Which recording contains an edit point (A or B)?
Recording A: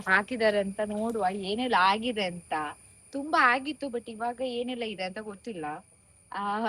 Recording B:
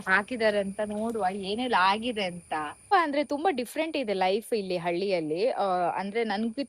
B